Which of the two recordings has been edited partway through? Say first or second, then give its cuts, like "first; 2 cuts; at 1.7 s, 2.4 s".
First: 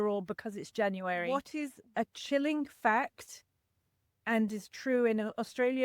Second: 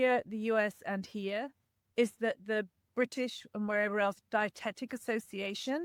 first; 1 cut; at 1.5 s